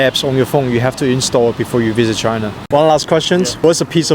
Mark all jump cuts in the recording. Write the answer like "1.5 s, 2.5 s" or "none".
2.6 s